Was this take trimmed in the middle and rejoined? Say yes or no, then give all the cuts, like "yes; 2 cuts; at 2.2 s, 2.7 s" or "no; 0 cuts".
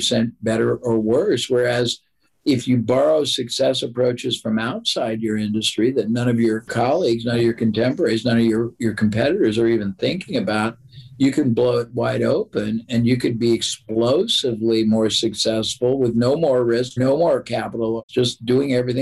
yes; 2 cuts; at 17.0 s, 18.1 s